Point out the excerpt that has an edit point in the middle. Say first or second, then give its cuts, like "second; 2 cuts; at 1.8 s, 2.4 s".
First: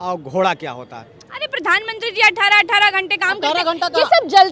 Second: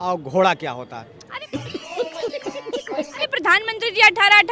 second; 2 cuts; at 1.5 s, 3.2 s